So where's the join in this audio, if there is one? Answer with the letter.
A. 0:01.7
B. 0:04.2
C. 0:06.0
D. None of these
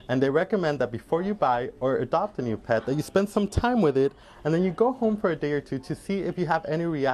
D